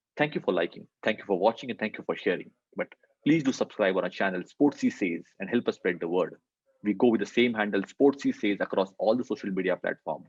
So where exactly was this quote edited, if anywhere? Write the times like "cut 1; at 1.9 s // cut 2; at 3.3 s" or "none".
none